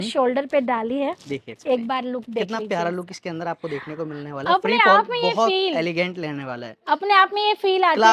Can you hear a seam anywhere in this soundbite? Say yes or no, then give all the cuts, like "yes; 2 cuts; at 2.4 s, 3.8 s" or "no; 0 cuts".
no; 0 cuts